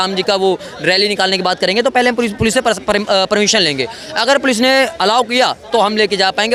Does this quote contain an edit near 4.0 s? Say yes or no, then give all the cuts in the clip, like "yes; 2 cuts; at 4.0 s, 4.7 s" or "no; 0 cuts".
no; 0 cuts